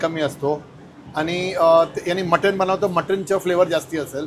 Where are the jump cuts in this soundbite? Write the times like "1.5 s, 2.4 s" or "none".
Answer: none